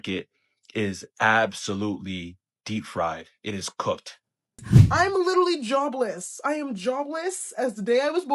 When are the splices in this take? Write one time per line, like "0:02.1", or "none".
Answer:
0:04.7

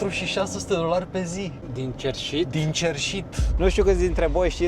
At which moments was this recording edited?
0:03.6

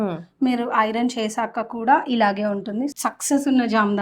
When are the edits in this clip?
0:02.9

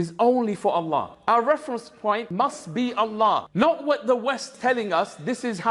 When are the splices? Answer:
none

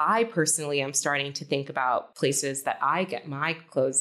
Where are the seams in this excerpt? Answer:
0:02.1

